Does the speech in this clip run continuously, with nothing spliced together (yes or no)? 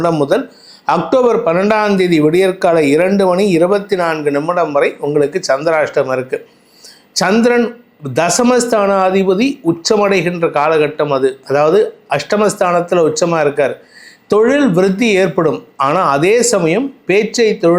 yes